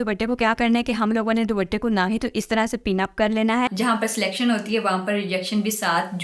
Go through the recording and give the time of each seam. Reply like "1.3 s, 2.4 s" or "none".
3.7 s